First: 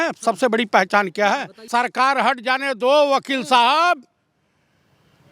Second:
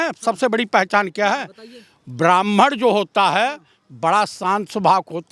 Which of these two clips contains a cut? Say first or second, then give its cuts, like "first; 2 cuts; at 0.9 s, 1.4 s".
first; 1 cut; at 1.7 s